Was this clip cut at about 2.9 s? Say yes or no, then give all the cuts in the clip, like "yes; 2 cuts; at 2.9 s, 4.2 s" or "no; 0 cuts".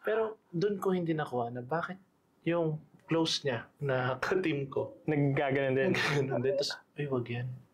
yes; 1 cut; at 2.9 s